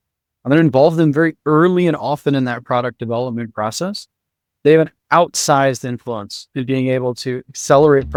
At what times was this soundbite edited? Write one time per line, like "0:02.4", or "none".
none